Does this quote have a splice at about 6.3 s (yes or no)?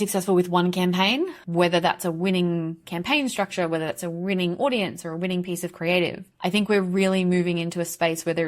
no